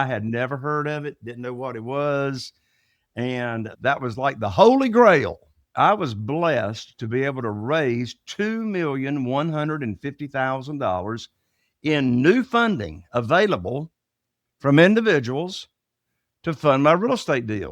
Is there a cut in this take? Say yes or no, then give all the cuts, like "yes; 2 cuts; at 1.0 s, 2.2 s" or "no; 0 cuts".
yes; 2 cuts; at 3.7 s, 5.7 s